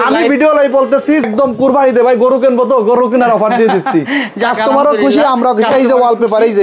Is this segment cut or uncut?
cut